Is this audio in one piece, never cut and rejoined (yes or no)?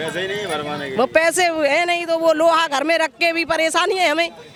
yes